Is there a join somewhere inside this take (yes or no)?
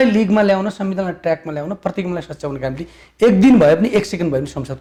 no